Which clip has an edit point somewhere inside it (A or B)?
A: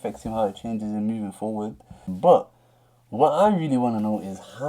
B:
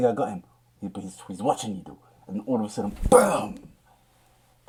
A